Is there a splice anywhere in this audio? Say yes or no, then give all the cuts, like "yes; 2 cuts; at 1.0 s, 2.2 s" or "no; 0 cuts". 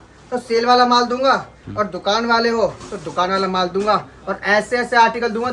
no; 0 cuts